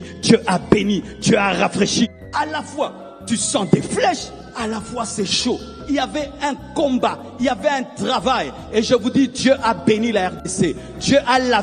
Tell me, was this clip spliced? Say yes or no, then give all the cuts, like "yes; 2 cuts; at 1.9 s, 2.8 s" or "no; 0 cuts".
yes; 1 cut; at 2.2 s